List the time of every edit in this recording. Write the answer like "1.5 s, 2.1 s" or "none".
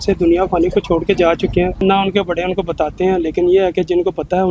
1.8 s